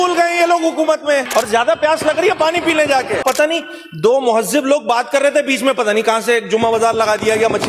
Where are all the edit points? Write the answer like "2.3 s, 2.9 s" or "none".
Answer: 1.3 s, 3.2 s